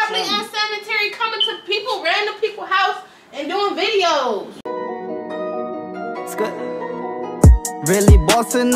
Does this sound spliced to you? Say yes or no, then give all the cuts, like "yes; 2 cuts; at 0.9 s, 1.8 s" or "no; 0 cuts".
yes; 1 cut; at 4.5 s